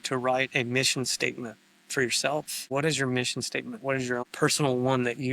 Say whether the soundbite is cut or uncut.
cut